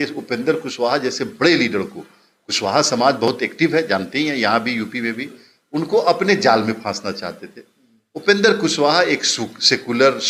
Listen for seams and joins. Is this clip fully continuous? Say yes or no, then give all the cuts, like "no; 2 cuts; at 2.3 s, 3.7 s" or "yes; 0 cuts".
yes; 0 cuts